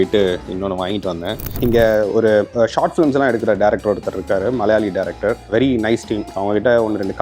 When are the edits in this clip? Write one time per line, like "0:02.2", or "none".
0:01.5
0:06.3